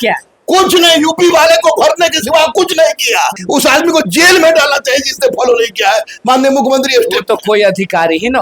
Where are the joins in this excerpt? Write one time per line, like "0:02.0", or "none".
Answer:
0:03.4